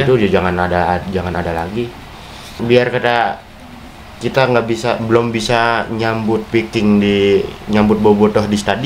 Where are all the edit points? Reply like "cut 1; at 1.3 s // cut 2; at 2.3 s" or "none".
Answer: cut 1; at 2.5 s